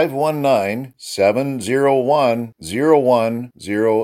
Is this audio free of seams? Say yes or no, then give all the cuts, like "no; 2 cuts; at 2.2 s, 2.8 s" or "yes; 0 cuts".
yes; 0 cuts